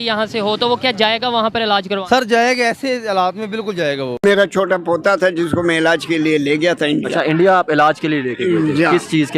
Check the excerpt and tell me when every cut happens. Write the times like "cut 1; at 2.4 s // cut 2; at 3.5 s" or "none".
cut 1; at 4.1 s